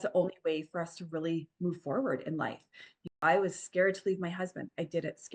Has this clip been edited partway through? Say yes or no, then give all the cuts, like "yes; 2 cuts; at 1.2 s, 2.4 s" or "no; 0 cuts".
yes; 1 cut; at 3.1 s